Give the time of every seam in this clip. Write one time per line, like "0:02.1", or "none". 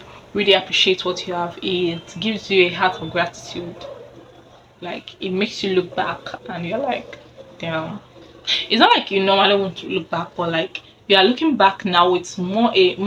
none